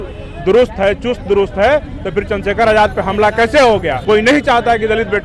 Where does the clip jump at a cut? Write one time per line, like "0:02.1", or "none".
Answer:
0:03.9